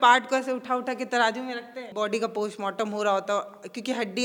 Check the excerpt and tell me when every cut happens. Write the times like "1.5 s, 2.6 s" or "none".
1.9 s